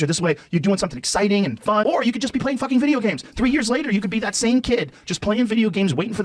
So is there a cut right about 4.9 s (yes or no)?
no